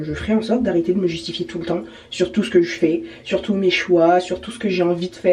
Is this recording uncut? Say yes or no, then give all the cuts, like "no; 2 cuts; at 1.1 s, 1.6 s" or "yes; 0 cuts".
yes; 0 cuts